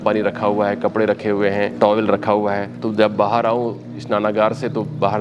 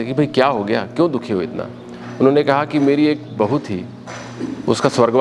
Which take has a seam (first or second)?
first